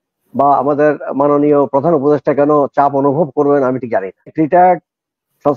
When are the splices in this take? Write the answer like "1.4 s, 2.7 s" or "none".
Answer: 4.3 s